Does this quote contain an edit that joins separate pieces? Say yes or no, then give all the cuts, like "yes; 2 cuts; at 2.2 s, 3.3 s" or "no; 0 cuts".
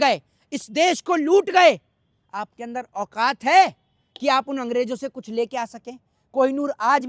no; 0 cuts